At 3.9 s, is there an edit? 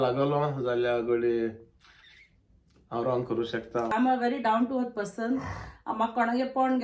yes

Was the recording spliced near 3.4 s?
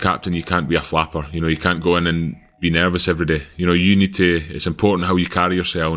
no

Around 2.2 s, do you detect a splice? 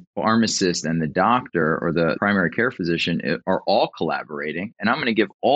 yes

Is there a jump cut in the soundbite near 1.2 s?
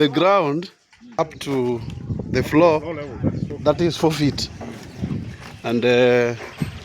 yes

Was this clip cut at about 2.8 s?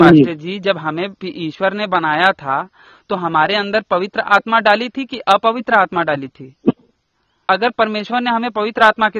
no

